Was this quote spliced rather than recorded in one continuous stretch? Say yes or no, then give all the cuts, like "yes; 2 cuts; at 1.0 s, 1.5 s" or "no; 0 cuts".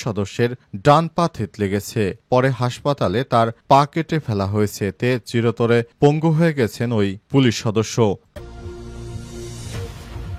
yes; 1 cut; at 8.3 s